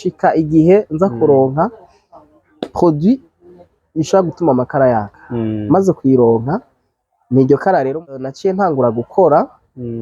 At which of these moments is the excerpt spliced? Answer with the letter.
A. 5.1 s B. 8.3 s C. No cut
B